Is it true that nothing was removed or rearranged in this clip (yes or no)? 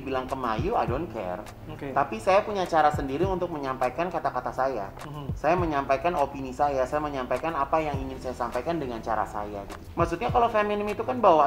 no